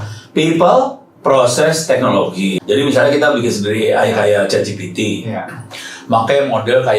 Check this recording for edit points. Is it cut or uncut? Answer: cut